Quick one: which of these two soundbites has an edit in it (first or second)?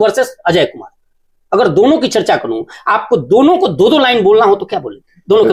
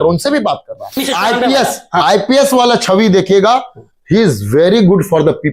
second